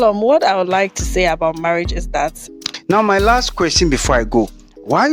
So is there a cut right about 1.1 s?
no; 1 cut; at 2.4 s

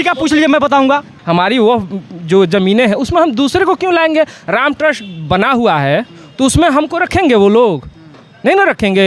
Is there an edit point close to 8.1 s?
no; 1 cut; at 1.1 s

